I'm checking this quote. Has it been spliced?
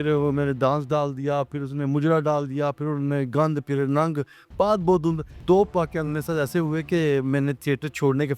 yes; 1 cut; at 5.3 s

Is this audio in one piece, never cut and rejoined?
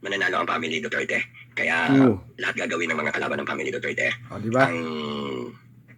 yes; 0 cuts

